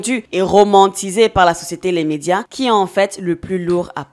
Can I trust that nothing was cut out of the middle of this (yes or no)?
yes